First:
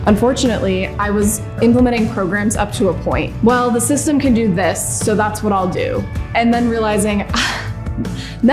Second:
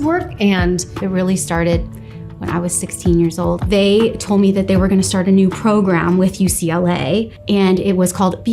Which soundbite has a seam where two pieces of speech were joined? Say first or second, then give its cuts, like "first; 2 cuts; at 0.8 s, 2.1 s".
second; 2 cuts; at 1.0 s, 3.6 s